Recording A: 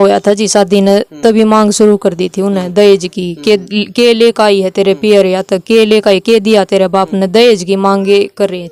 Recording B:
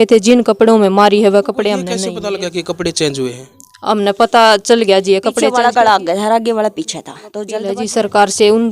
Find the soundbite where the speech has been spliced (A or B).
B